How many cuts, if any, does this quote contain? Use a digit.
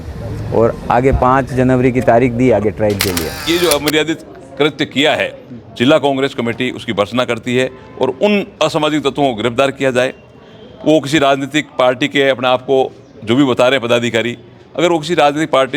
1